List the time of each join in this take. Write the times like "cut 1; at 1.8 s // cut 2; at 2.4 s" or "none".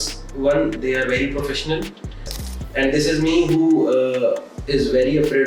cut 1; at 2.3 s